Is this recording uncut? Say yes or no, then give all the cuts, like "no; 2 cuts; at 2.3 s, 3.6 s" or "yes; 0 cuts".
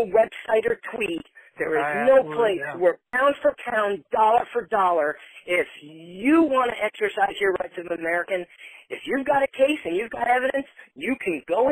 no; 1 cut; at 3.1 s